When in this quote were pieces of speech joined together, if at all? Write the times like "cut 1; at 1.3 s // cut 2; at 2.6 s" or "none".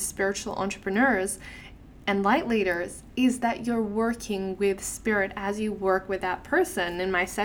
none